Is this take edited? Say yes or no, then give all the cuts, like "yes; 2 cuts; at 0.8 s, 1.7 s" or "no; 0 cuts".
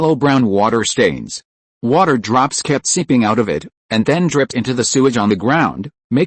no; 0 cuts